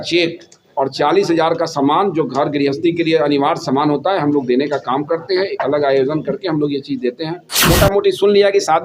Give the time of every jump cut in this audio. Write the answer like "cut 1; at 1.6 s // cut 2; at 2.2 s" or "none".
cut 1; at 7.7 s